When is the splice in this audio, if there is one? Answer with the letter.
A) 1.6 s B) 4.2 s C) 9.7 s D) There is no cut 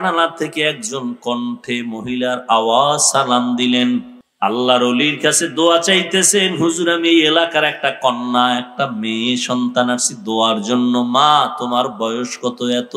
B